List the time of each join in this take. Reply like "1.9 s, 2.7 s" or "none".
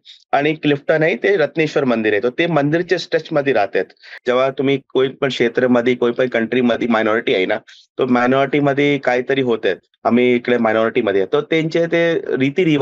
4.2 s, 9.9 s